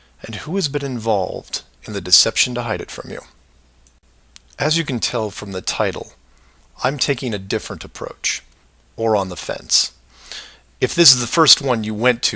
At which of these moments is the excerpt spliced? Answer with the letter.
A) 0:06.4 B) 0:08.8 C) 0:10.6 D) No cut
D